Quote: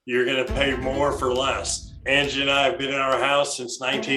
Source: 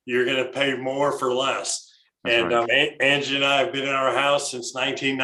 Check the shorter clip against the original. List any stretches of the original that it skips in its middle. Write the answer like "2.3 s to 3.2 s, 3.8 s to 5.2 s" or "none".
2.0 s to 3.0 s

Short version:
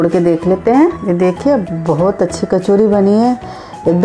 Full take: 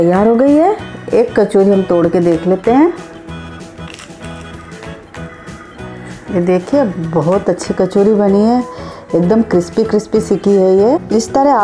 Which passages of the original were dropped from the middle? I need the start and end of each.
3.0 s to 6.3 s

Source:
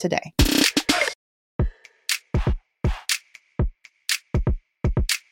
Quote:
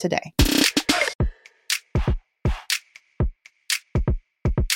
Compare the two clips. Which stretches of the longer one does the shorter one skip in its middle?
1.1 s to 1.5 s

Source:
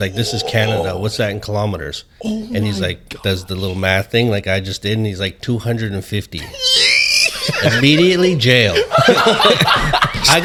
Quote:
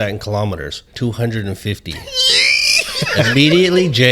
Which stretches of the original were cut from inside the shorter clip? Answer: 2.1 s to 5.4 s

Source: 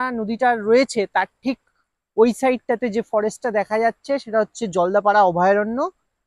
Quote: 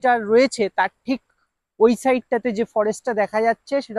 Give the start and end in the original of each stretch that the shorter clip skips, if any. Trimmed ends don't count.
none

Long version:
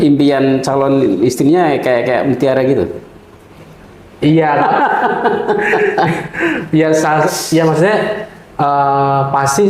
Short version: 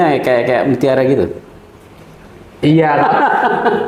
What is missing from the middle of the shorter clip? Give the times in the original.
none

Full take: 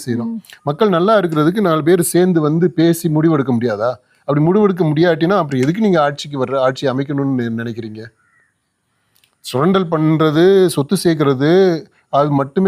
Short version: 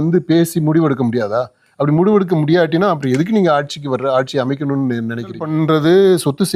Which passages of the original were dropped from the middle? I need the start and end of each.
7.9 s to 9.9 s

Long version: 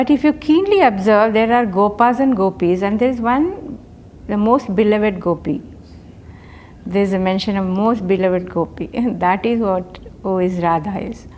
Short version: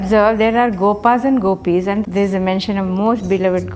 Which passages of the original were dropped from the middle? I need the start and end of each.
3.0 s to 6.8 s

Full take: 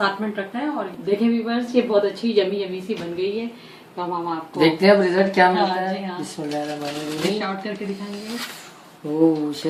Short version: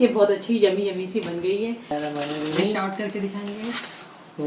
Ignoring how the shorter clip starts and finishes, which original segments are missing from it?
3.7 s to 6.6 s

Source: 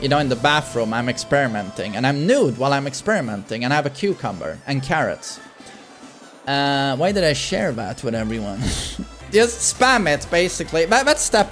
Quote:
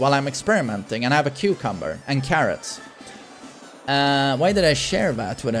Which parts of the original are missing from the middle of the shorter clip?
none

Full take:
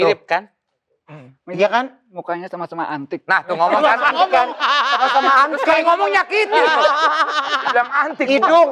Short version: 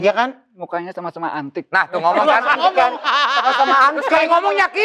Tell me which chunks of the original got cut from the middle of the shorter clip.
none

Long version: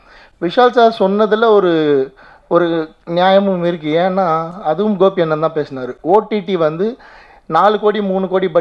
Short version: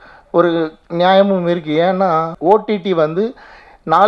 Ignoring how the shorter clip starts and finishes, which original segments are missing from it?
4.5 s to 5.9 s

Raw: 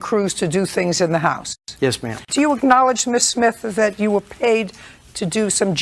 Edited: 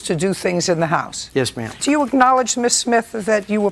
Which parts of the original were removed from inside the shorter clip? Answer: 1.8 s to 1.9 s

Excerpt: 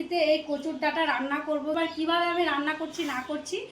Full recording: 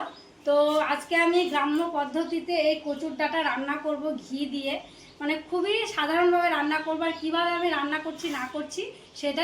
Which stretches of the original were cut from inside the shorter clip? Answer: 4.1 s to 7.0 s

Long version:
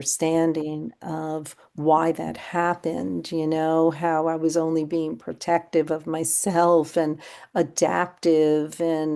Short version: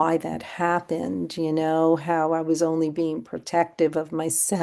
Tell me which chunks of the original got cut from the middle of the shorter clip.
none

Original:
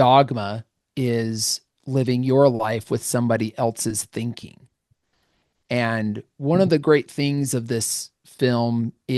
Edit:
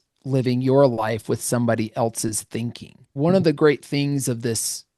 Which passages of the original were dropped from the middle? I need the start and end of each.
4.6 s to 6.3 s

